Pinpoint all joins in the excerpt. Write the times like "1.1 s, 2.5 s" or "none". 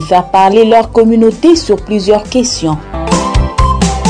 2.9 s

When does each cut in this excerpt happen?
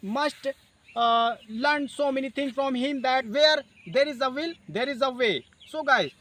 3.3 s

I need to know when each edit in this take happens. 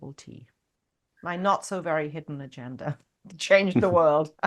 none

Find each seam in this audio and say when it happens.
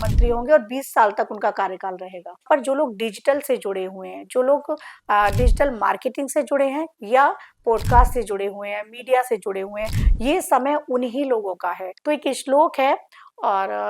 2.4 s, 11.9 s

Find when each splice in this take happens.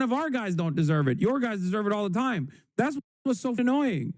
3.0 s

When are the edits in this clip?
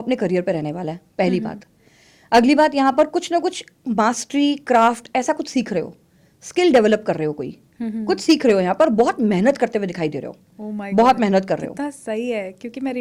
none

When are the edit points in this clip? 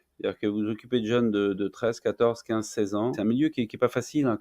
3.2 s

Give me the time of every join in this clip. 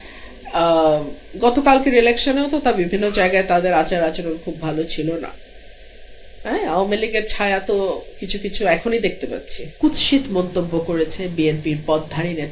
9.7 s

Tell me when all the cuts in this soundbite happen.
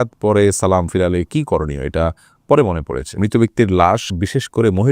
3.2 s

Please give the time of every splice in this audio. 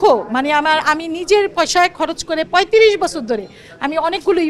none

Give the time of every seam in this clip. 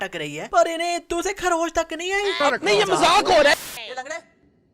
2.4 s, 3.5 s

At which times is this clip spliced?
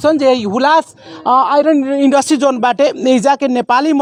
none

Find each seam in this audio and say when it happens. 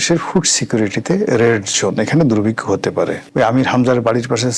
3.2 s

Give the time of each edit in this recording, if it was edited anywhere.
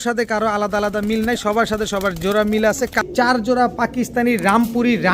3.0 s

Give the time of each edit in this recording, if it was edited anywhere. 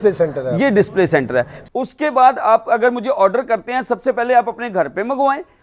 1.6 s

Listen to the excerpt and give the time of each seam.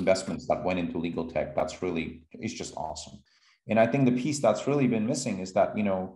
3.1 s

